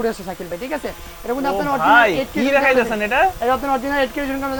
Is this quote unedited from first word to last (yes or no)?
yes